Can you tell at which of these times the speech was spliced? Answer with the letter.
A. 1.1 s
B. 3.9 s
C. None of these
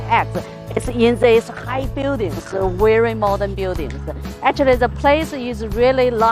A